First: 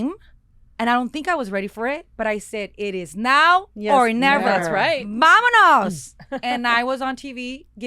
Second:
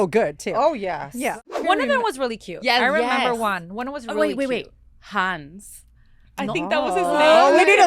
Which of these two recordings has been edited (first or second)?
second